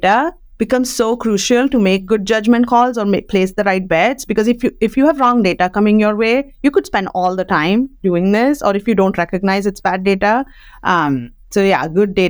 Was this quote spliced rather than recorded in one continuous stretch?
no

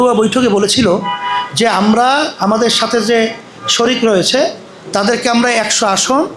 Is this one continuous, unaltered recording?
yes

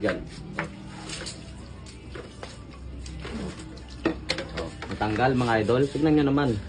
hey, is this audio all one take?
yes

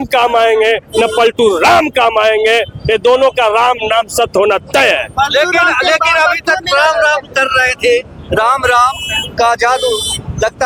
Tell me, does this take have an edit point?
no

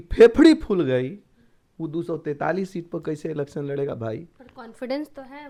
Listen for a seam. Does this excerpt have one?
no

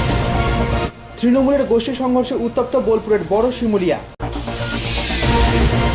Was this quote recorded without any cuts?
no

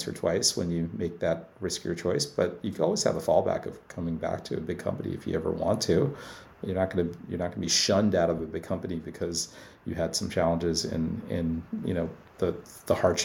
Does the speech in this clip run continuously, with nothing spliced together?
yes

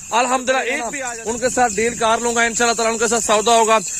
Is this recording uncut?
no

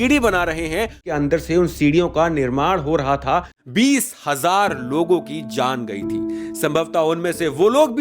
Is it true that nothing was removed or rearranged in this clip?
no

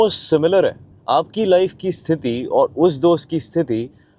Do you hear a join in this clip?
no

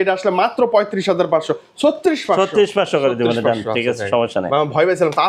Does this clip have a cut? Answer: no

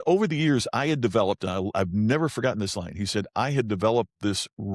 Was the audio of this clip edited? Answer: no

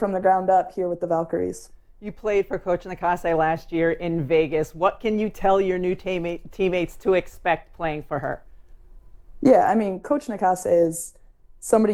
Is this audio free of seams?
yes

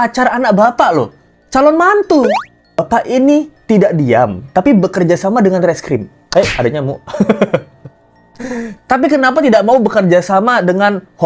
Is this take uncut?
no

